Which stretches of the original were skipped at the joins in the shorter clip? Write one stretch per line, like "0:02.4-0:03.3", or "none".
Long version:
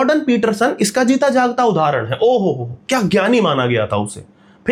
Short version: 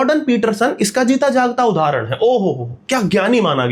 none